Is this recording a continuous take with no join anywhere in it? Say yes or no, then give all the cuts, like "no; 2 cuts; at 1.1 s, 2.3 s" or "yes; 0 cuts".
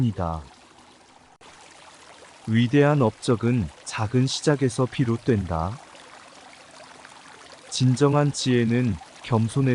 yes; 0 cuts